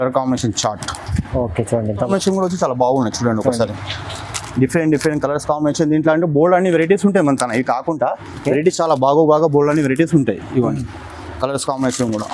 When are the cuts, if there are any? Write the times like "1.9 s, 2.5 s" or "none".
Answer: 2.1 s